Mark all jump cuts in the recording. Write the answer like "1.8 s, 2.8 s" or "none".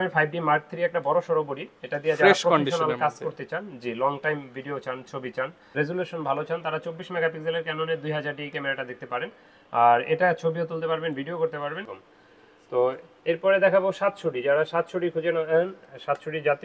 5.7 s, 12.0 s